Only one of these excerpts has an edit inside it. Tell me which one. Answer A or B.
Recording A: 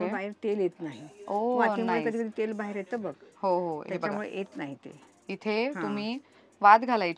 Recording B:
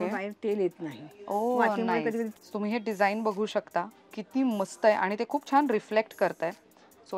B